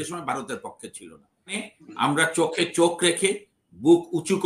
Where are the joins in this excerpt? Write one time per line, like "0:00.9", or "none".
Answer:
0:01.6